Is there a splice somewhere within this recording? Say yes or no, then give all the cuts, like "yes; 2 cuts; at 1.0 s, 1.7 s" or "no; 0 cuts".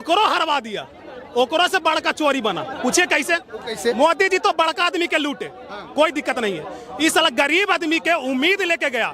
no; 0 cuts